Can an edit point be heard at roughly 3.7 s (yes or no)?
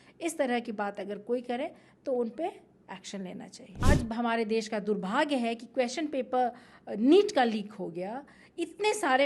yes